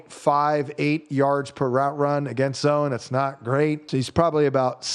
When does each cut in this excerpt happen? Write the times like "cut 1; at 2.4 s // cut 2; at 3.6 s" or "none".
cut 1; at 3.8 s

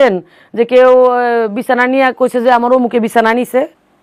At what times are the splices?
none

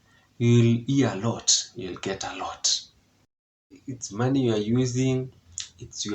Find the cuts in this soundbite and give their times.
cut 1; at 3.6 s

